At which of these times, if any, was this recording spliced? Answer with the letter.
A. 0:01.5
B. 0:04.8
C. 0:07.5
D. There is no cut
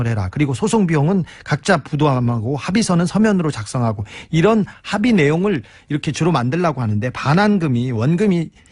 D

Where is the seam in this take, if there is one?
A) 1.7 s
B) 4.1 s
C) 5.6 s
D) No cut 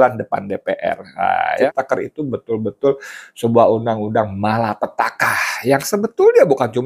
A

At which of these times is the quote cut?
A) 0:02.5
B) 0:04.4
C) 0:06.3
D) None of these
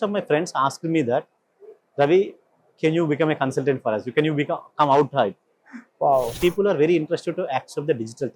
C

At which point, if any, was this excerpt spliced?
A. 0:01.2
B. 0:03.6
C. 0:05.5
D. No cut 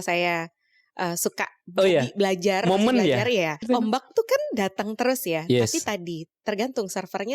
B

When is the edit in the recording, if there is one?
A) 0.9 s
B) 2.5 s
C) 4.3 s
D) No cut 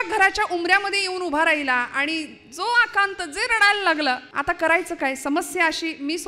C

